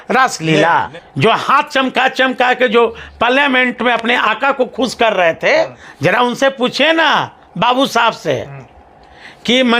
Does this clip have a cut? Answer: yes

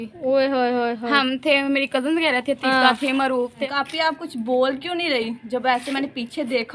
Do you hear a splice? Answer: yes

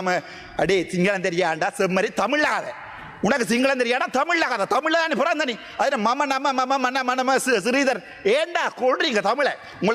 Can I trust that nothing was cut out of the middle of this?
yes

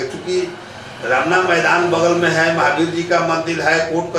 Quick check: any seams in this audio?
no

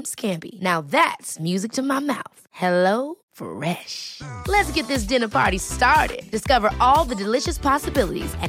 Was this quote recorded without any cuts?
yes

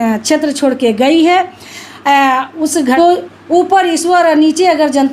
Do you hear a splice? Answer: yes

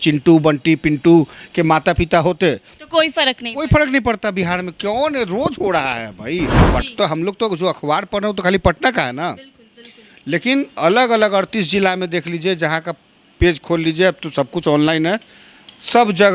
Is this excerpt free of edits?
no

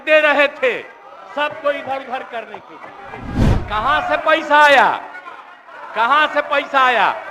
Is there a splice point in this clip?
yes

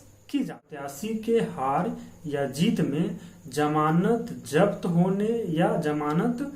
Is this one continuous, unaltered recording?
no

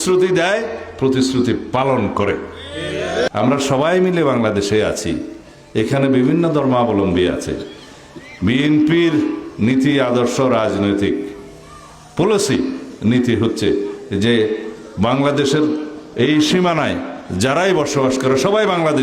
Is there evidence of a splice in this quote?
yes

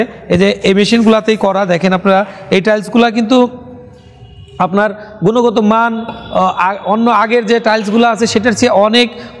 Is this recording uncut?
yes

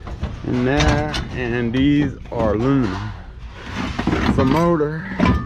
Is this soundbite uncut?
yes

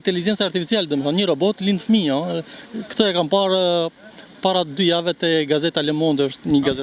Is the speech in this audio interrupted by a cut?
no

